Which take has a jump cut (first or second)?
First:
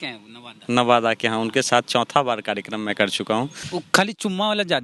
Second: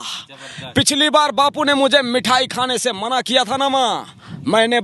first